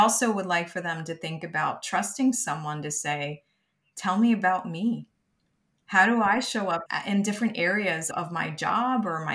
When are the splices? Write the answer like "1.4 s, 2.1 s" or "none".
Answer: 6.9 s, 8.0 s